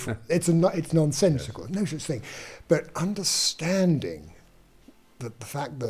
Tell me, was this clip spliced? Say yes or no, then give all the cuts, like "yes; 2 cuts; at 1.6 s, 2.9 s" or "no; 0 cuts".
no; 0 cuts